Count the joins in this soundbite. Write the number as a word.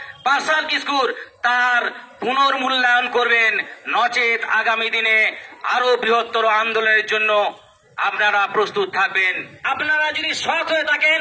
one